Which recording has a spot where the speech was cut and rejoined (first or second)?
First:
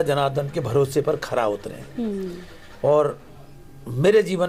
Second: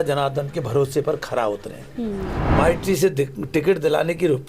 second